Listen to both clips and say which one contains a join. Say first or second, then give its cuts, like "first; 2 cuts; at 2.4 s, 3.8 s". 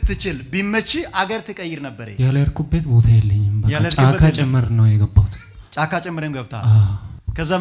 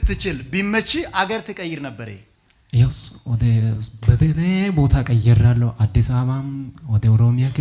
first; 1 cut; at 2.0 s